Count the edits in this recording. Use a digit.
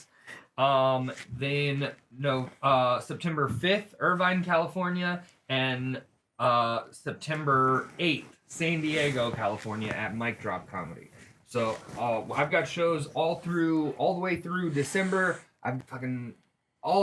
1